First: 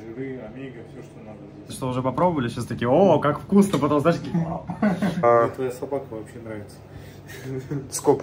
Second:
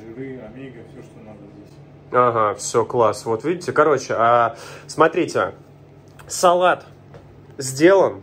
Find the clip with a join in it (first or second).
first